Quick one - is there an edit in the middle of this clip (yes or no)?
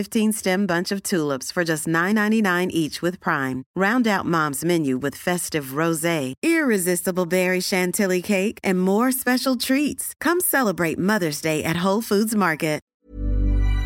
yes